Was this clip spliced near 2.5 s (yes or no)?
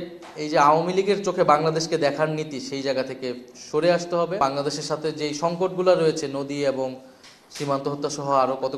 no